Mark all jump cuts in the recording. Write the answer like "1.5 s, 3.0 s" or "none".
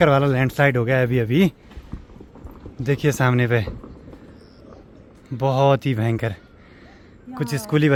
none